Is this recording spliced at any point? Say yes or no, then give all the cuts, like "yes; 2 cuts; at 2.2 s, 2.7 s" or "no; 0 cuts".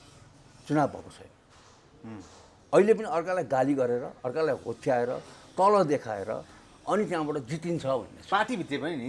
no; 0 cuts